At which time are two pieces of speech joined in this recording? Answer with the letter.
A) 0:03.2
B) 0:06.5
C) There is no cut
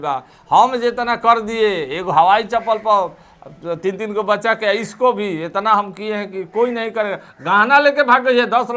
C